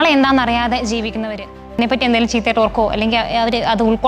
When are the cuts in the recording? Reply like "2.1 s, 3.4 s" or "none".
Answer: 1.8 s